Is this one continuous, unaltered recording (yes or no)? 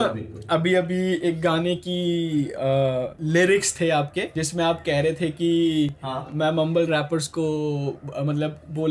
no